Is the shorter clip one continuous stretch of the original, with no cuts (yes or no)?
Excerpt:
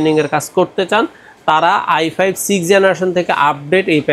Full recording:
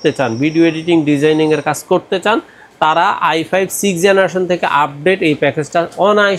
yes